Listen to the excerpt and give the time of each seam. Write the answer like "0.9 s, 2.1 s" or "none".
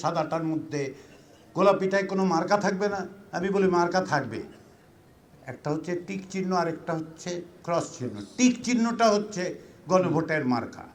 none